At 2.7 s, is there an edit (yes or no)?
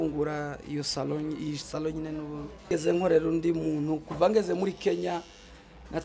yes